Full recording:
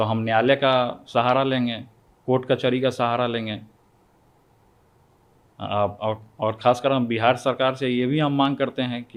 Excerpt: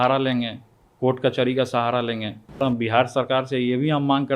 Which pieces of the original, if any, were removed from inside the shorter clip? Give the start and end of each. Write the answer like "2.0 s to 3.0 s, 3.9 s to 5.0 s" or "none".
3.9 s to 6.9 s